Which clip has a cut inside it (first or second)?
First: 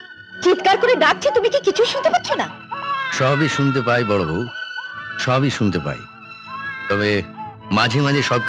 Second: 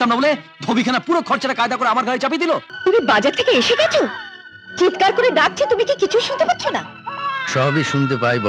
second